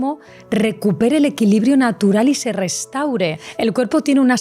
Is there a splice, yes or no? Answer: yes